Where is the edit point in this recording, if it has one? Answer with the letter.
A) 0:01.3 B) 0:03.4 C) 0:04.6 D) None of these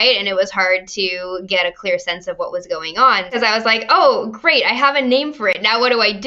B